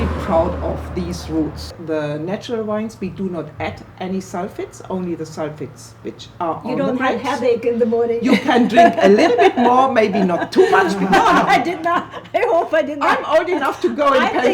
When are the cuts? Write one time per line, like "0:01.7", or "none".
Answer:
0:01.7
0:11.0